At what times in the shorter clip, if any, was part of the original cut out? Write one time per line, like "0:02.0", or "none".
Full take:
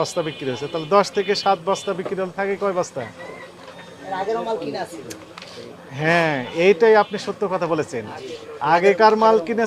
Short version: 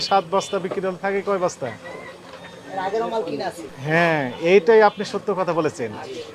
0:03.7

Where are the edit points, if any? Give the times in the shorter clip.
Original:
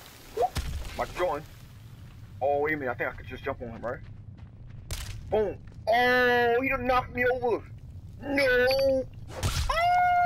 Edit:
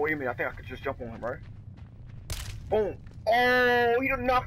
none

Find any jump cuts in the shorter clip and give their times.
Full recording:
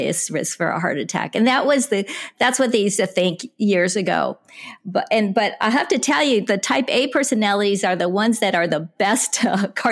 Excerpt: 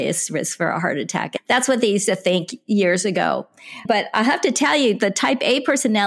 0:01.3
0:03.8

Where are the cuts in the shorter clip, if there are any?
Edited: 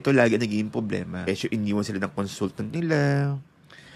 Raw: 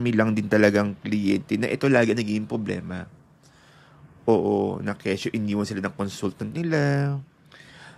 0:01.3

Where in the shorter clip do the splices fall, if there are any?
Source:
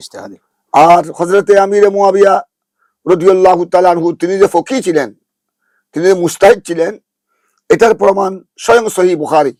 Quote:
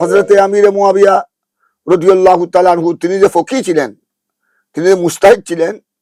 none

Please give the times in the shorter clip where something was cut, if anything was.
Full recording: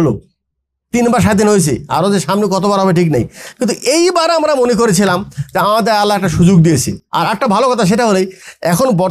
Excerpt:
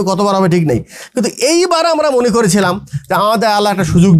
none

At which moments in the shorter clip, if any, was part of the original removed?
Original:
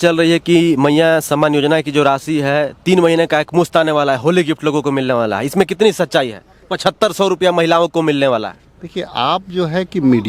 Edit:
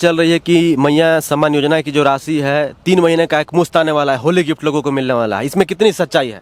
none

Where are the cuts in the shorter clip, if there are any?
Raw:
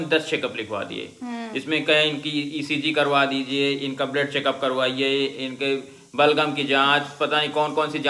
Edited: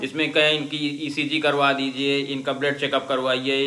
none

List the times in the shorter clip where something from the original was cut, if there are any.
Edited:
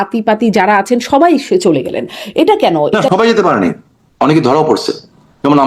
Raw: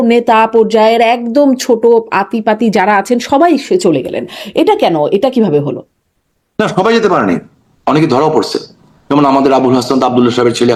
0:02.9

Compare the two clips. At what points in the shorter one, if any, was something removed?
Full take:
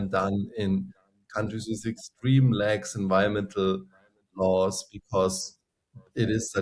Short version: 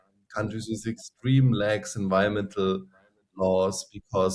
none

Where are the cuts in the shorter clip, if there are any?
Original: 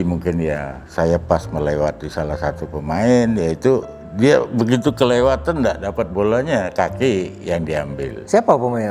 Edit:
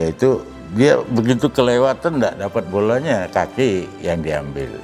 none

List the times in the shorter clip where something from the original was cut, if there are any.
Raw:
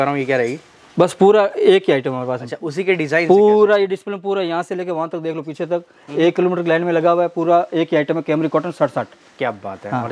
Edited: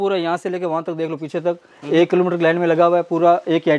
none

